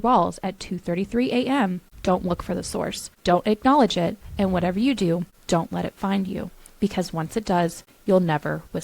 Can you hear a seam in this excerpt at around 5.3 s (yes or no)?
yes